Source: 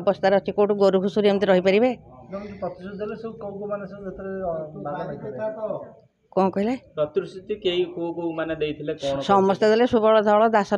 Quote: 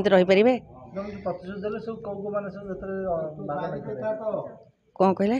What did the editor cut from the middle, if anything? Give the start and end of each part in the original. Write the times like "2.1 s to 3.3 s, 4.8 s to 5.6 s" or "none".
none